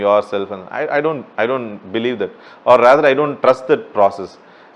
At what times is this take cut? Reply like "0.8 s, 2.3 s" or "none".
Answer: none